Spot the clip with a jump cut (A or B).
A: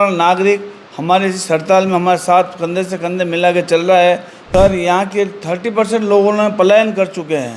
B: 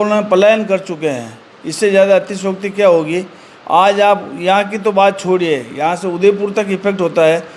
A